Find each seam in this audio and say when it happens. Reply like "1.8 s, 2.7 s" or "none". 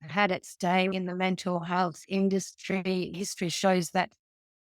0.9 s, 3.1 s